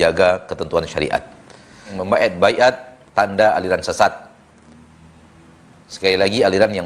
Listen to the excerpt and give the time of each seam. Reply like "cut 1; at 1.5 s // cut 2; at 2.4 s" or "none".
cut 1; at 1.9 s